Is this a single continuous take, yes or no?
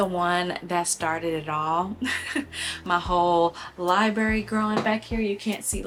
yes